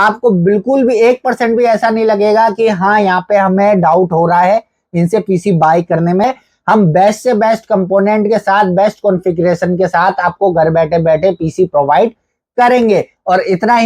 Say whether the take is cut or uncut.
uncut